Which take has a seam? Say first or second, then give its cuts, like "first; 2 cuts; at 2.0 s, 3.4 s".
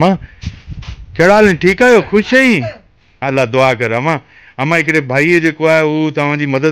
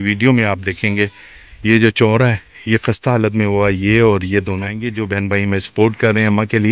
second; 1 cut; at 4.9 s